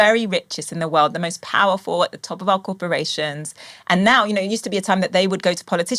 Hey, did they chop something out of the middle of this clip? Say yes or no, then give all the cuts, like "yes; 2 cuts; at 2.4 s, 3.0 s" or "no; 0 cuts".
no; 0 cuts